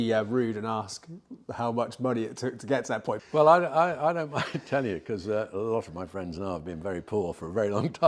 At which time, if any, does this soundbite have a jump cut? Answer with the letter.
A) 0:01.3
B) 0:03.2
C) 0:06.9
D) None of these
B